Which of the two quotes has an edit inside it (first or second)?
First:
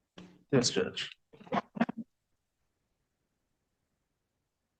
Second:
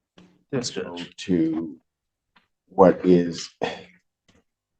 second